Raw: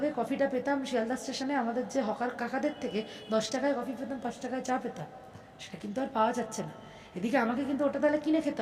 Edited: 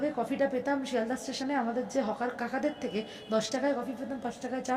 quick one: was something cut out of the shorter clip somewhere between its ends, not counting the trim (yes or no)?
no